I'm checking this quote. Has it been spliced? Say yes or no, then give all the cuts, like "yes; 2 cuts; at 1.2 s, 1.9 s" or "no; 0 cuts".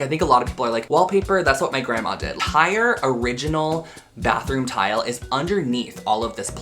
yes; 1 cut; at 2.4 s